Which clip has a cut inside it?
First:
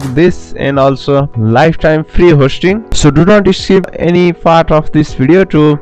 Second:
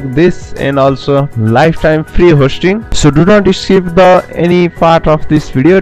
first; 1 cut; at 3.9 s

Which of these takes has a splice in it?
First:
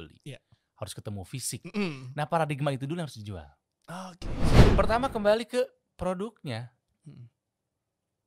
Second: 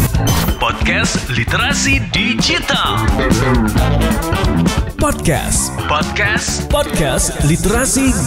first; 1 cut; at 4.5 s

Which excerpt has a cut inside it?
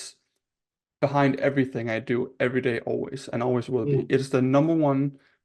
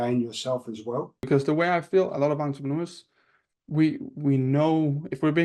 second; 1 cut; at 1.3 s

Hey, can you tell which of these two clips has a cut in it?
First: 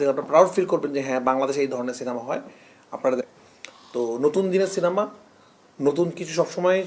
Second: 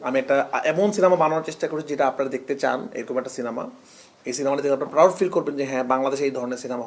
first; 1 cut; at 3.2 s

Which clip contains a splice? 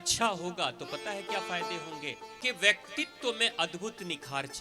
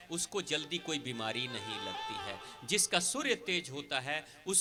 first; 1 cut; at 2.3 s

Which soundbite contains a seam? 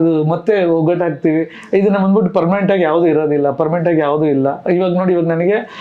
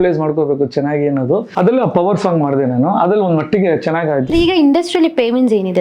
second; 2 cuts; at 1.5 s, 4.3 s

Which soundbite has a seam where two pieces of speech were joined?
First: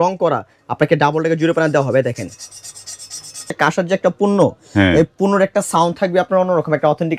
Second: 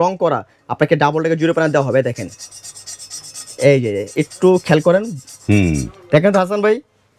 first; 1 cut; at 3.5 s

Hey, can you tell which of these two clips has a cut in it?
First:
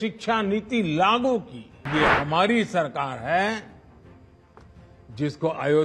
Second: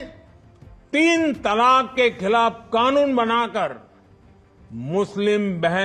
first; 1 cut; at 1.9 s

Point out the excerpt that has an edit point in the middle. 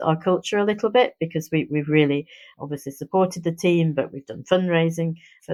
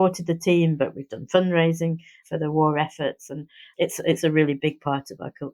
second; 1 cut; at 4.6 s

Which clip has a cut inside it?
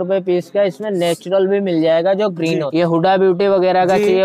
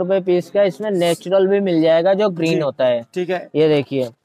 first; 1 cut; at 2.7 s

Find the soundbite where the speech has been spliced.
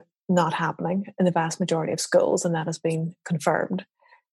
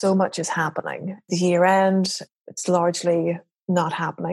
second; 2 cuts; at 1.3 s, 2.2 s

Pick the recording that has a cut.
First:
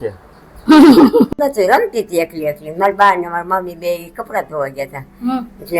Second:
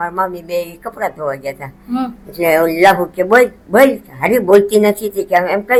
first; 1 cut; at 1.3 s

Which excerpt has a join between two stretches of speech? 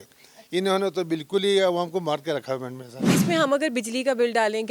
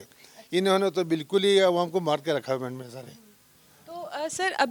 first; 1 cut; at 3.1 s

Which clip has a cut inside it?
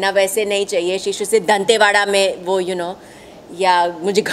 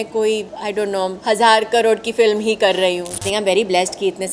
second; 2 cuts; at 1.0 s, 3.2 s

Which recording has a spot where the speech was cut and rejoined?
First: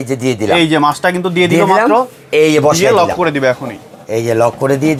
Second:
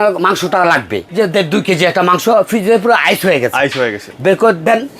second; 2 cuts; at 1.0 s, 4.0 s

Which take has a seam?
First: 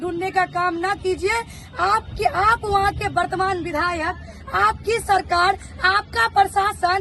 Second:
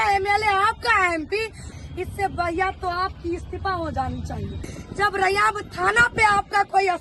second; 2 cuts; at 1.7 s, 4.8 s

